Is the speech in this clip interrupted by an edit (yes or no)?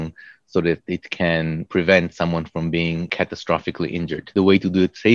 yes